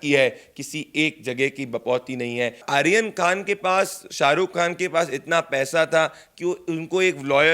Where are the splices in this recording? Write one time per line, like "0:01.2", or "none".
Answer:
0:02.6